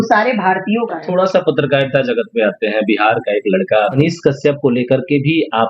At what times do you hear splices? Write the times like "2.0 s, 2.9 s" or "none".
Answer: 1.0 s